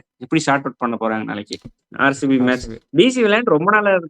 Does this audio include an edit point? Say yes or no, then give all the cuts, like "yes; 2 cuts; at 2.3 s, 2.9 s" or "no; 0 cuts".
yes; 1 cut; at 1.8 s